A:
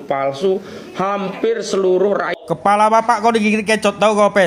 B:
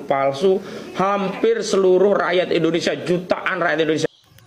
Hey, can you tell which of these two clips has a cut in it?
A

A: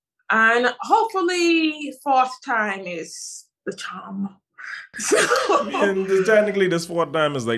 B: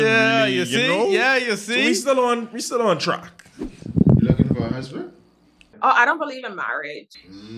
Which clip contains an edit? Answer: B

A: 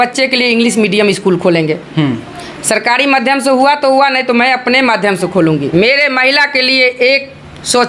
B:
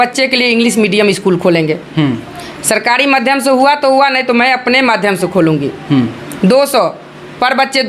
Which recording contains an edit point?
A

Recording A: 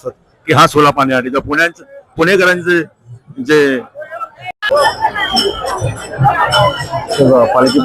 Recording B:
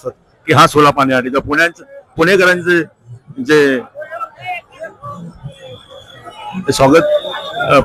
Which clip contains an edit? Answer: A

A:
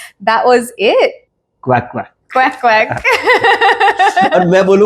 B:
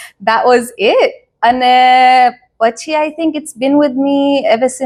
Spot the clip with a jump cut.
A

